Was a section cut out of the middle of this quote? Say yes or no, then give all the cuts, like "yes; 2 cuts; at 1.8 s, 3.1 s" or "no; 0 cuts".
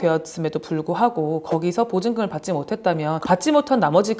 yes; 1 cut; at 3.2 s